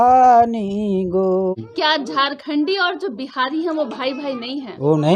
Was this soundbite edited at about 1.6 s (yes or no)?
yes